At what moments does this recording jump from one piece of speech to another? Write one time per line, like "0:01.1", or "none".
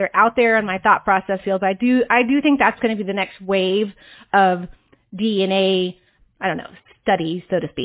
0:06.1